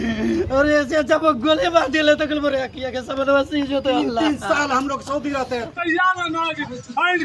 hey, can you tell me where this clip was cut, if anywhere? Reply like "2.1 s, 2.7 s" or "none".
5.7 s